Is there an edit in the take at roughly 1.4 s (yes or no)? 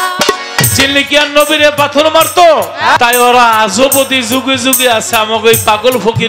no